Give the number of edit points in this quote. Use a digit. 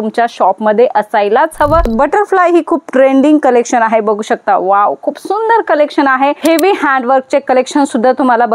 2